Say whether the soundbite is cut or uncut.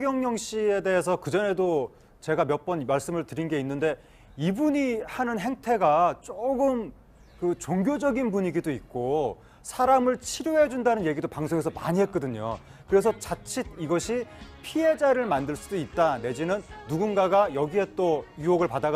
uncut